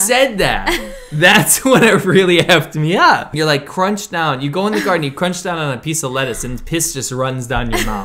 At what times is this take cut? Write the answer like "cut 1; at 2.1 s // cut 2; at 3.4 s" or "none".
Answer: cut 1; at 3.3 s